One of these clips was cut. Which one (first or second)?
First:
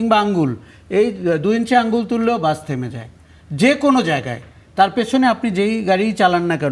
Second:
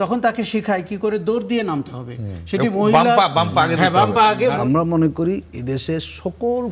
second